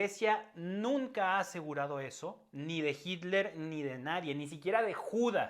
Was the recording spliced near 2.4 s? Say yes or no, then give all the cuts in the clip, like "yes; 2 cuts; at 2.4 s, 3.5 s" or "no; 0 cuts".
no; 0 cuts